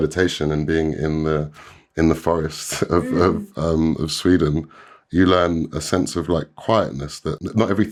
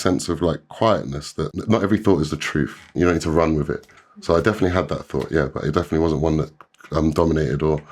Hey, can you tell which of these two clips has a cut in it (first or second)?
second